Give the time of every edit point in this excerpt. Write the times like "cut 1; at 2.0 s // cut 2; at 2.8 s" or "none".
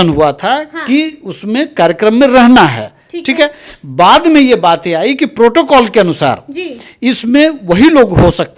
none

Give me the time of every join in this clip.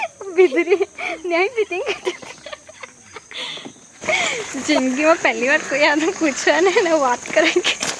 cut 1; at 4.3 s

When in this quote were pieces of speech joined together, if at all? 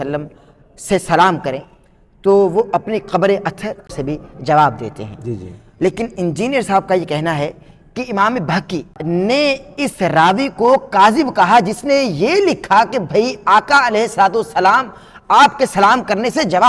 cut 1; at 3.9 s // cut 2; at 9.0 s

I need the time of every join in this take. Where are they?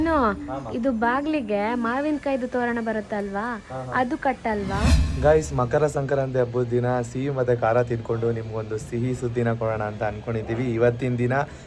cut 1; at 5.0 s

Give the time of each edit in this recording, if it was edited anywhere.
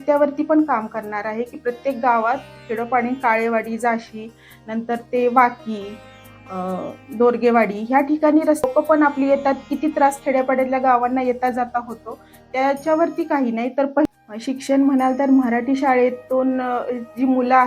cut 1; at 8.6 s // cut 2; at 14.1 s

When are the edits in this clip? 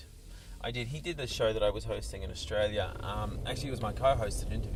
none

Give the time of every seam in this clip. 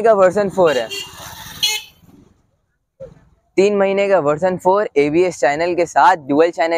none

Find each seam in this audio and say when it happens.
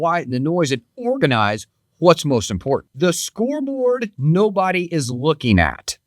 cut 1; at 2.9 s

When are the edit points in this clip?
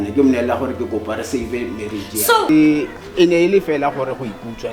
cut 1; at 2.5 s

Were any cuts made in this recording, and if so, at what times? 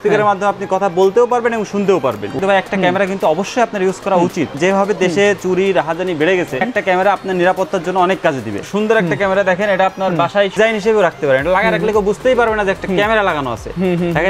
cut 1; at 2.3 s // cut 2; at 4.5 s // cut 3; at 6.7 s // cut 4; at 8.6 s // cut 5; at 10.5 s

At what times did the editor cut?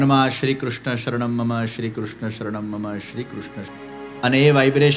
cut 1; at 3.7 s

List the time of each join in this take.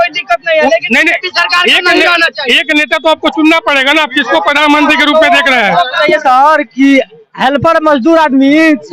cut 1; at 6.0 s

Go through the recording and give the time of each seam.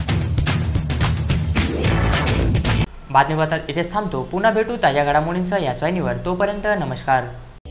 none

